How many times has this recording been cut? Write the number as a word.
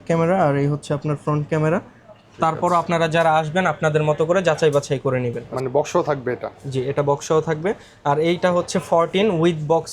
one